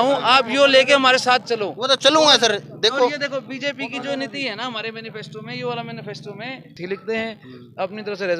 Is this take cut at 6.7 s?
yes; 1 cut; at 6.7 s

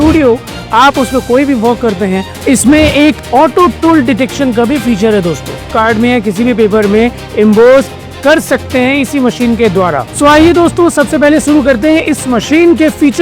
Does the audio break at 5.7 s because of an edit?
yes; 3 cuts; at 2.3 s, 5.7 s, 10.1 s

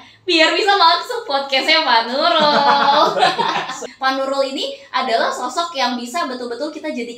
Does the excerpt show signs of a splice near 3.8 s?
yes; 1 cut; at 3.8 s

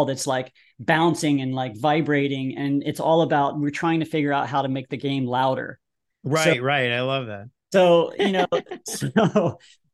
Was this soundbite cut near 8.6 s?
no; 0 cuts

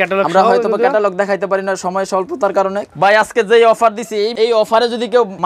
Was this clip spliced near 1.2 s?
no; 1 cut; at 2.8 s

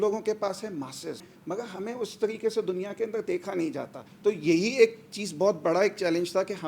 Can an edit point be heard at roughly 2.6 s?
no; 2 cuts; at 1.3 s, 4.0 s

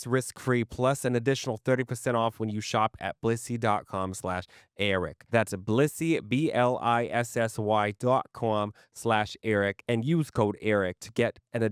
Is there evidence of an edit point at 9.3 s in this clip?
no; 0 cuts

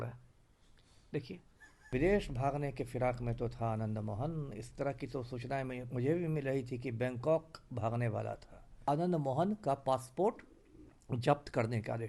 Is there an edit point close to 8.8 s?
yes; 2 cuts; at 1.9 s, 8.8 s

